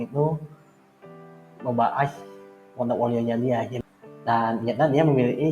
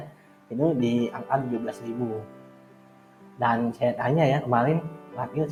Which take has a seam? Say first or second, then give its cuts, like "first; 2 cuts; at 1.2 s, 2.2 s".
first; 1 cut; at 3.7 s